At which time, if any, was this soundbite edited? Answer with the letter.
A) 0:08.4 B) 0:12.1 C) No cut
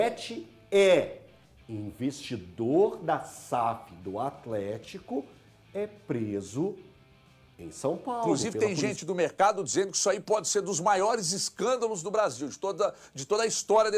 A